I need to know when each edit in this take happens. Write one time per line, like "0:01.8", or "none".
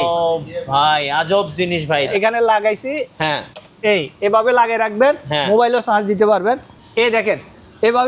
0:02.1